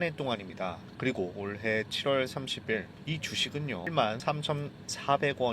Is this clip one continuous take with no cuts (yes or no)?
no